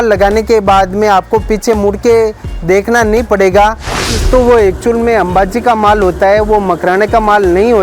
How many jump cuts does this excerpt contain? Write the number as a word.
one